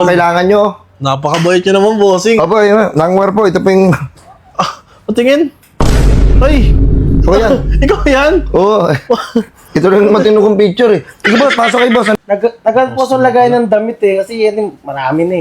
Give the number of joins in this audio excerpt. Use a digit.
1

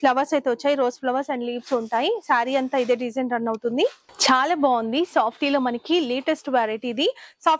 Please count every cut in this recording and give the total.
1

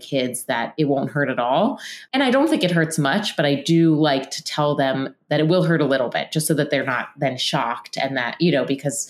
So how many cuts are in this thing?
1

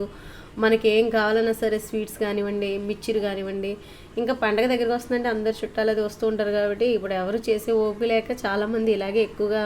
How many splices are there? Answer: 0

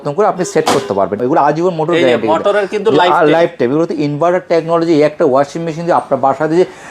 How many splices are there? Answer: 1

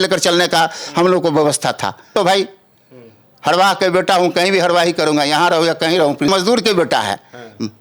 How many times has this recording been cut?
2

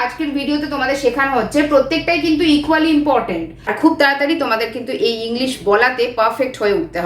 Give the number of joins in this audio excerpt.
1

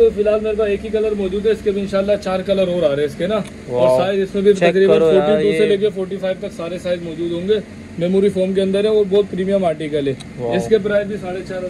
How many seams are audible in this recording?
0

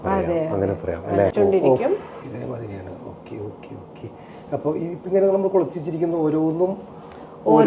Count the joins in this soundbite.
1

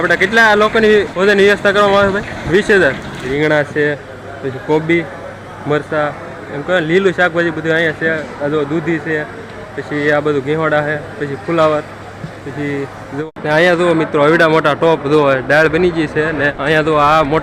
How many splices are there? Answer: 5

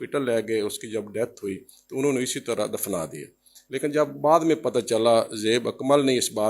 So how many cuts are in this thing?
0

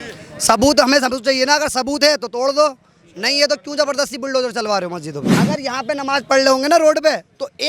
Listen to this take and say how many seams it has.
1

